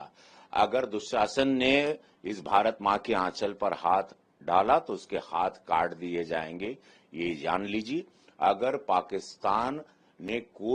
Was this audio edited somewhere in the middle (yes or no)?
no